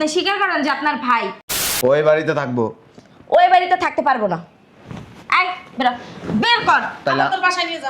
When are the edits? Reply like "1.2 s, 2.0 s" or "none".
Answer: 1.4 s